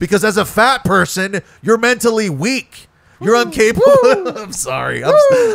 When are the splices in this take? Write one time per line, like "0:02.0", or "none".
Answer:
none